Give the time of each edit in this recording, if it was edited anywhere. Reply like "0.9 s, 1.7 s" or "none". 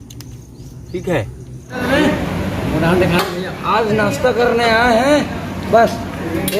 1.8 s